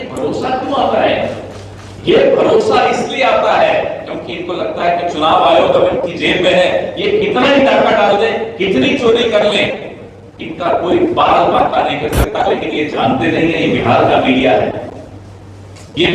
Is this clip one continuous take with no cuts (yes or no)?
yes